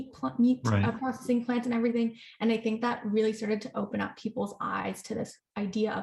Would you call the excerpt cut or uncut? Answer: uncut